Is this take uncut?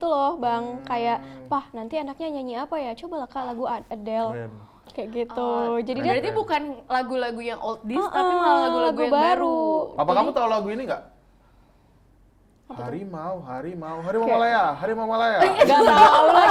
yes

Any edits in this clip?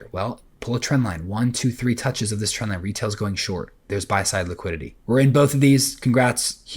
yes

